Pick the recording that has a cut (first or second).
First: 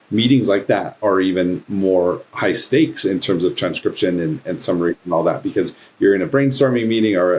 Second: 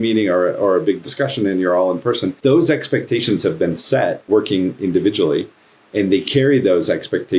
second